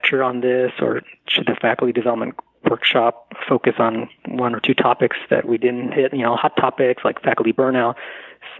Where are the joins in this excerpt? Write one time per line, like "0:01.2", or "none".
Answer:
none